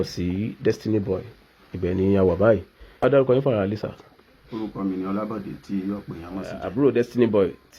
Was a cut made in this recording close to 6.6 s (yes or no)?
yes